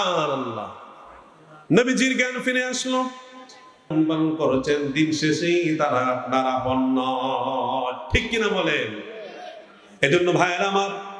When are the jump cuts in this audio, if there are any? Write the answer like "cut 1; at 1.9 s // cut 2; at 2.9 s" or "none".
cut 1; at 3.9 s